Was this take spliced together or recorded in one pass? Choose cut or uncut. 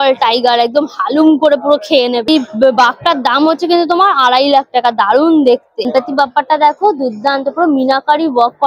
uncut